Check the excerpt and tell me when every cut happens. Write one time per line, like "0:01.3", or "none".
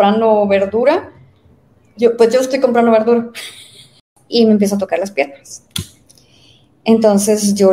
0:04.1